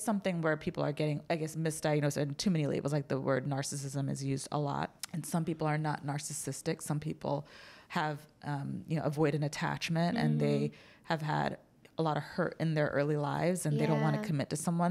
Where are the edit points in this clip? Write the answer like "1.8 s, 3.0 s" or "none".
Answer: 1.2 s, 4.9 s